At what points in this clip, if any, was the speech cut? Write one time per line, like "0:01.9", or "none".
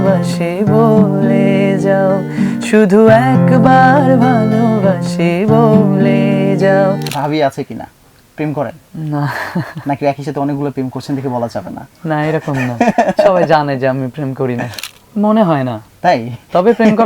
0:07.1
0:14.7